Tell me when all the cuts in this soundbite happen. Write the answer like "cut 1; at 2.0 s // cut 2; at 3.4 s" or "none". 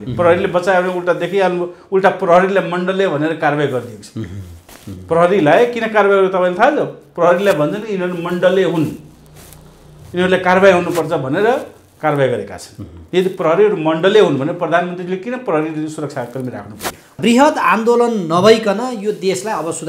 cut 1; at 17.2 s

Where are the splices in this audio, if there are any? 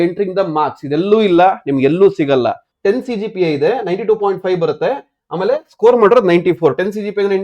cut 1; at 2.7 s

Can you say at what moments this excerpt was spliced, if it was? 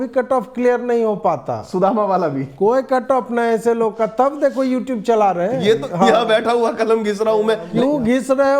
cut 1; at 5.9 s // cut 2; at 7.7 s

